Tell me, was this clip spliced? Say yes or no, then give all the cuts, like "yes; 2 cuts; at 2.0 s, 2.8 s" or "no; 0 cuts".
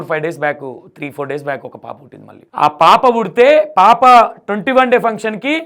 no; 0 cuts